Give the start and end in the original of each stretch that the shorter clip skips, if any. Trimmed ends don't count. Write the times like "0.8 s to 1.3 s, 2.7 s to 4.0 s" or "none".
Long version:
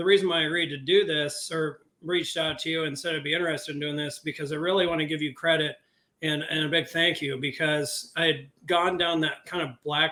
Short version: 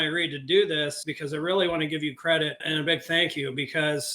1.4 s to 4.2 s, 5.8 s to 6.5 s